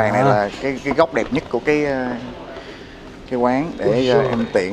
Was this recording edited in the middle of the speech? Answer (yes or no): no